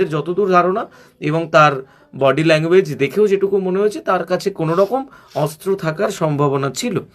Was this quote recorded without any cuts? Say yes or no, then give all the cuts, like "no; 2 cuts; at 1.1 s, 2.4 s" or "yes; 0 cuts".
yes; 0 cuts